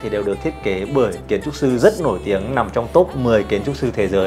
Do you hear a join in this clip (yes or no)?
no